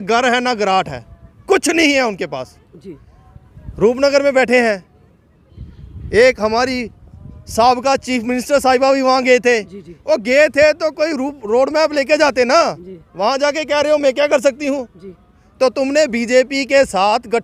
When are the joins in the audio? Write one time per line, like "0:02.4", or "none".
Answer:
none